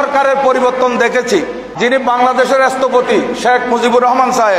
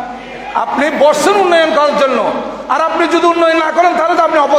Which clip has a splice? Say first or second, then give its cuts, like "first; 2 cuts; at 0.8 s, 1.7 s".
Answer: first; 1 cut; at 1.7 s